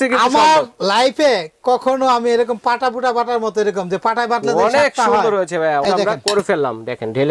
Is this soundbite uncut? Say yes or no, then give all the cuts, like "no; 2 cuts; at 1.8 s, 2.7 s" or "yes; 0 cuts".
no; 1 cut; at 5.8 s